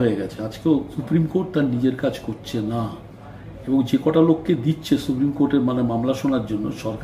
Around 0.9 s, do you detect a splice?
yes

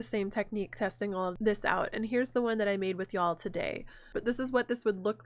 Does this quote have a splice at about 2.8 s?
no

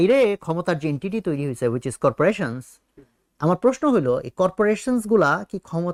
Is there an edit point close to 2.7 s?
no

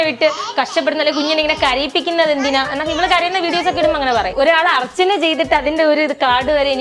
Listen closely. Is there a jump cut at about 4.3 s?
yes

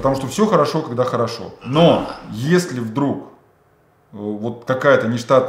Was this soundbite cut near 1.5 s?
yes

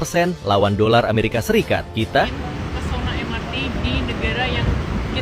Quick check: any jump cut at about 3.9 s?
no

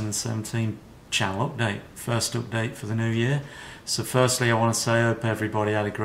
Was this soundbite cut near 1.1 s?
yes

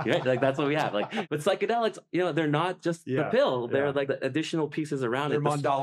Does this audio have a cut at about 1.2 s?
yes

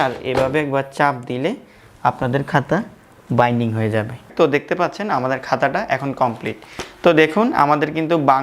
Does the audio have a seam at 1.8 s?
no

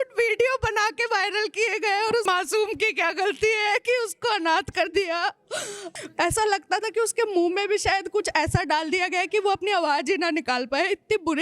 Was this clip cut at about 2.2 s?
yes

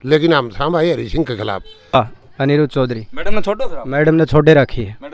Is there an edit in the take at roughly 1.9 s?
yes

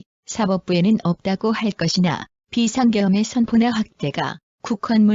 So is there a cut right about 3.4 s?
no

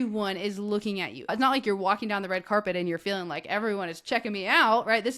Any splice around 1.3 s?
yes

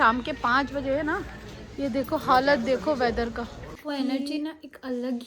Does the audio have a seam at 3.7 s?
yes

